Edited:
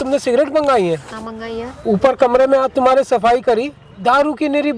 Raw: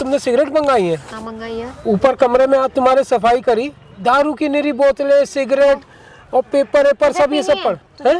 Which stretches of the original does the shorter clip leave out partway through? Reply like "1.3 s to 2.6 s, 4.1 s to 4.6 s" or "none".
none